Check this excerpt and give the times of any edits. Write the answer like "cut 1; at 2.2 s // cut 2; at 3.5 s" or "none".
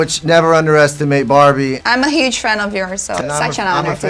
cut 1; at 1.8 s // cut 2; at 3.1 s